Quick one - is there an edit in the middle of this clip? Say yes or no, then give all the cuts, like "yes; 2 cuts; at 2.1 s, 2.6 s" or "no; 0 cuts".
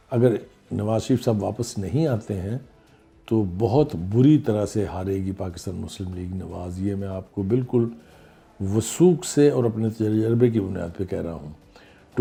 no; 0 cuts